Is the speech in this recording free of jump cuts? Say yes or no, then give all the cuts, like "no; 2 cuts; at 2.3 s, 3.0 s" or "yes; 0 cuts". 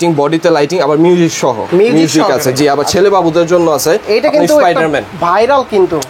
yes; 0 cuts